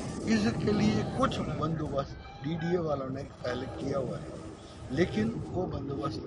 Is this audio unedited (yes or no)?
yes